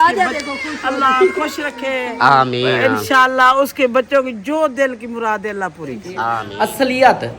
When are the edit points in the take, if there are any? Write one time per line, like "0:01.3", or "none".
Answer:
0:06.3